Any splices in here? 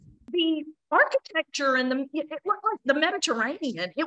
no; 0 cuts

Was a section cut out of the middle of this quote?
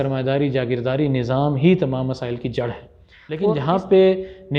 yes; 1 cut; at 3.5 s

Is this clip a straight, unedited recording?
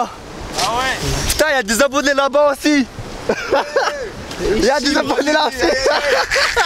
yes; 0 cuts

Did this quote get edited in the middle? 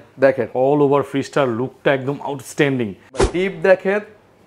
yes; 1 cut; at 3.3 s

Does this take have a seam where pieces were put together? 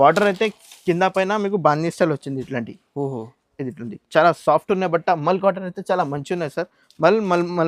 no; 0 cuts

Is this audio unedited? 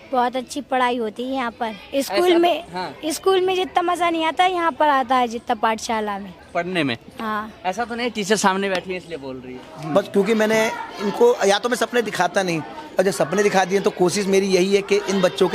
no; 1 cut; at 9.5 s

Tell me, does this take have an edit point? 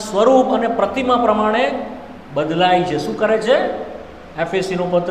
no; 0 cuts

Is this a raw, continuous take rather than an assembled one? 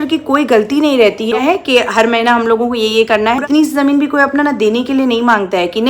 no; 2 cuts; at 1.4 s, 3.4 s

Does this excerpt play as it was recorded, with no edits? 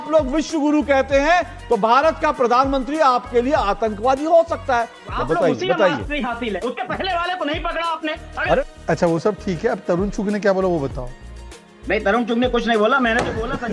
no; 2 cuts; at 5.0 s, 8.7 s

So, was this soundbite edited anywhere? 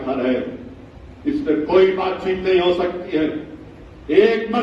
no; 0 cuts

